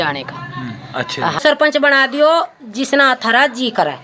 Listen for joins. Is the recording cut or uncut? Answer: cut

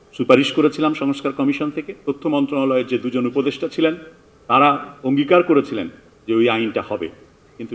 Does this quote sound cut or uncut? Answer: cut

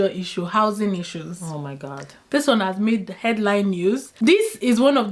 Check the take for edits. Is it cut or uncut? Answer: cut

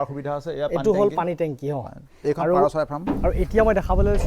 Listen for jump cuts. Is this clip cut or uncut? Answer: cut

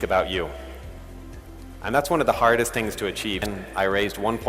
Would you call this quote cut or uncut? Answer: cut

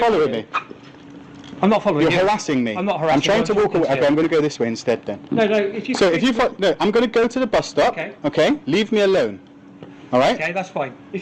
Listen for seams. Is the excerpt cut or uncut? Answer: uncut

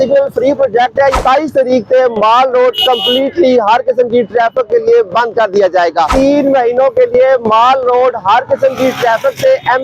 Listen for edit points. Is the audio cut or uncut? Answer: cut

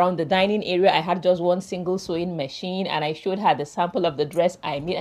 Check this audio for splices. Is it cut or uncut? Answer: uncut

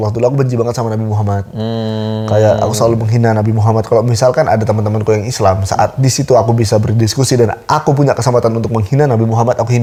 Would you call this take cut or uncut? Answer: uncut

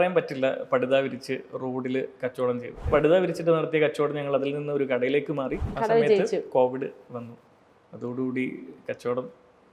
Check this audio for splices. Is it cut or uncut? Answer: cut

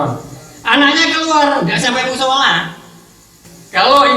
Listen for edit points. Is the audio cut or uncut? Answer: cut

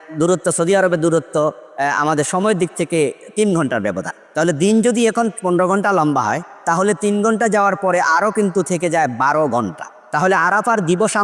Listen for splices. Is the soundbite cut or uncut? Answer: uncut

